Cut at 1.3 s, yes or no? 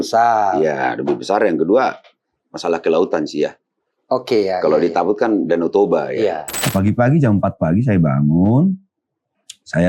no